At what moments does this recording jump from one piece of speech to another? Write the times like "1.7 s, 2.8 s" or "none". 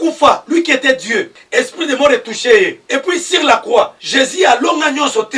1.4 s, 2.8 s, 4.0 s